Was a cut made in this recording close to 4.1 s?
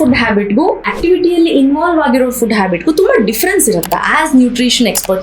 no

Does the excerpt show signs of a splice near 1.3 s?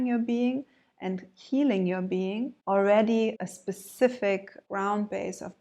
no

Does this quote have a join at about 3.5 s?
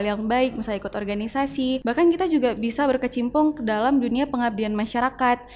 no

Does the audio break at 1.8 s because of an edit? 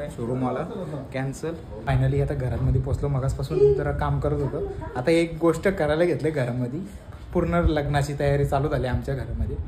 yes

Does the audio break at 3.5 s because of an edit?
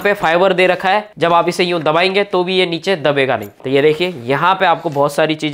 yes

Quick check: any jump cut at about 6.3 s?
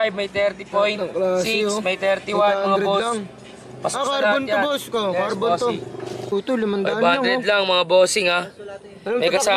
yes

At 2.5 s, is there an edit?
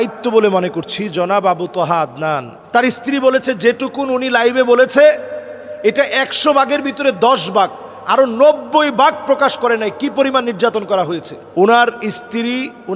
yes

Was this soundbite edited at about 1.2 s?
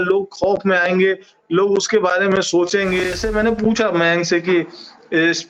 no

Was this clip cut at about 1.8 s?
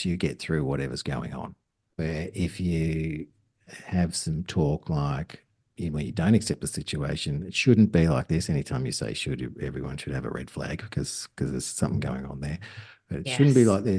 yes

